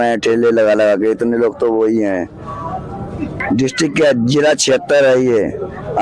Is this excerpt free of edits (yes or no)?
no